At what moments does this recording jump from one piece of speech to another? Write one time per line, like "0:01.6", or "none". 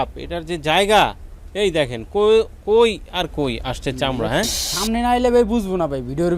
0:04.6